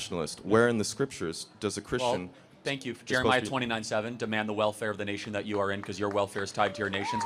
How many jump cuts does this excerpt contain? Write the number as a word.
zero